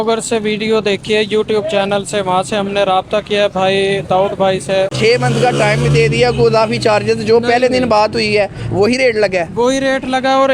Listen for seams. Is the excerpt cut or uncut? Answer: cut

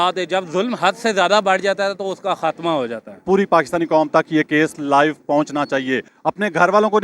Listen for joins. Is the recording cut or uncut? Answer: cut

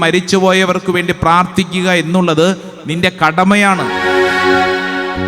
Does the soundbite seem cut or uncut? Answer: cut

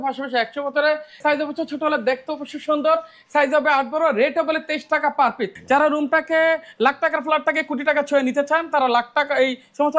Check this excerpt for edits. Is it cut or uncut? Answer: cut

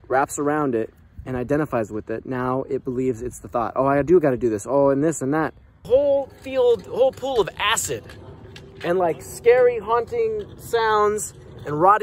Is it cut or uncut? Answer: cut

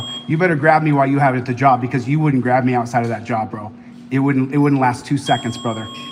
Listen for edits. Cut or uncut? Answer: uncut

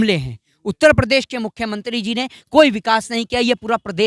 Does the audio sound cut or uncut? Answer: uncut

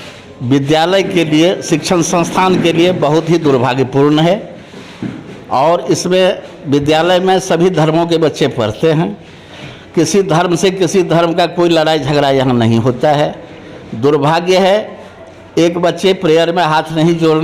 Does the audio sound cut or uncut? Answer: uncut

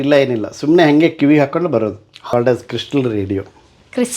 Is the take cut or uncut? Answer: cut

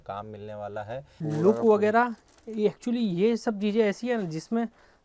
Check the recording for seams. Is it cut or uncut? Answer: cut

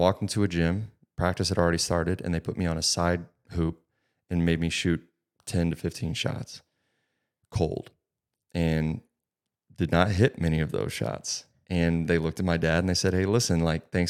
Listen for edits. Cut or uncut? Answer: uncut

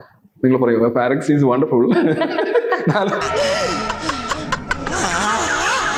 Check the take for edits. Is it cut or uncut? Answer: uncut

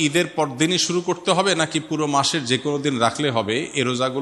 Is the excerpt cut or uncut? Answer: uncut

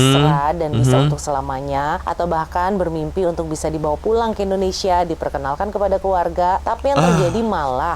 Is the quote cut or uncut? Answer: uncut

